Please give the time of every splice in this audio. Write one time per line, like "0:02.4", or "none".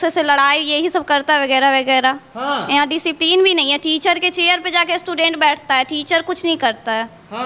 none